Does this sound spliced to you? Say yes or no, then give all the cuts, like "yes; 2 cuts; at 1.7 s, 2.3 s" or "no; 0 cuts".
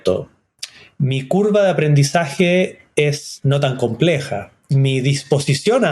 yes; 2 cuts; at 3.3 s, 4.5 s